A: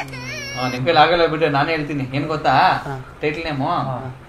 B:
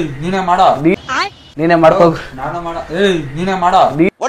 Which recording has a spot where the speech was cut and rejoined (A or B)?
B